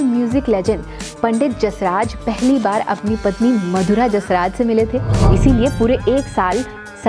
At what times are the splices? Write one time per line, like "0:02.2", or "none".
0:05.2

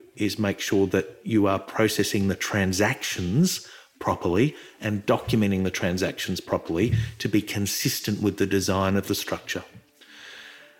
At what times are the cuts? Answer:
none

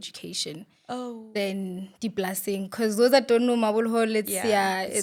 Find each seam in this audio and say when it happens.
none

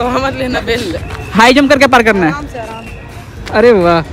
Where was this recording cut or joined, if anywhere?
none

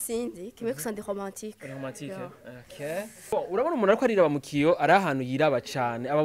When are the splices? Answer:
0:03.2

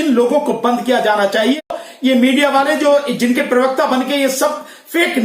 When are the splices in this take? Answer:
0:01.6

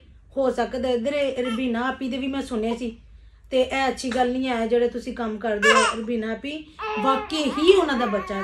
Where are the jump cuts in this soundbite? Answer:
none

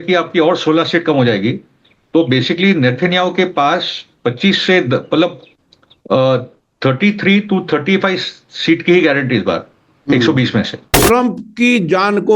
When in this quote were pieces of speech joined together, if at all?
0:10.9

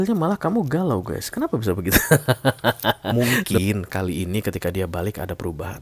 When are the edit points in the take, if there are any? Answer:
0:03.0

